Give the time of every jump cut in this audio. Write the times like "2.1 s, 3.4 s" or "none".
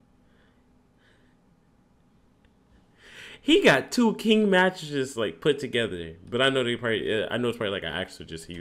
none